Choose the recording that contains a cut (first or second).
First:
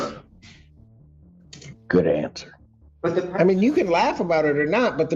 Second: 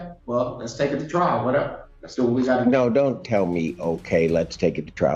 first